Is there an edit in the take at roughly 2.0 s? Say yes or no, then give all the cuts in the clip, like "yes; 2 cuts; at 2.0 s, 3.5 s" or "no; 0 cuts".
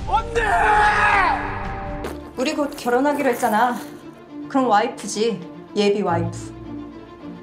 yes; 1 cut; at 2.0 s